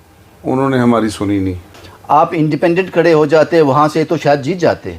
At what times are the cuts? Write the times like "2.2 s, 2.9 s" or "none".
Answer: 1.7 s